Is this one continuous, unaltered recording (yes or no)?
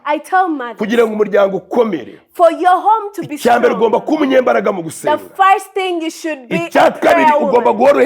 yes